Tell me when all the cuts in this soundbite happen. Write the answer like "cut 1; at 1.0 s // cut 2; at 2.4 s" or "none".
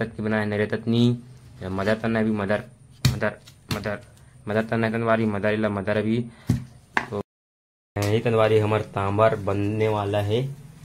cut 1; at 7.2 s